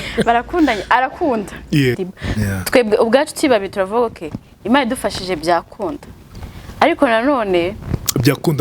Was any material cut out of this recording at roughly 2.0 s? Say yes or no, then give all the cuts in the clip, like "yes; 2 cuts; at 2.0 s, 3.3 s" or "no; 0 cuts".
yes; 1 cut; at 2.0 s